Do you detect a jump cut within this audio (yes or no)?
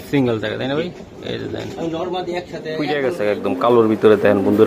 yes